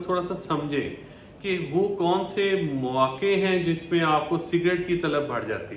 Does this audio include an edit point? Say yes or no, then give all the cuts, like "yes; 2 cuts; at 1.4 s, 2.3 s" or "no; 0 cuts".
no; 0 cuts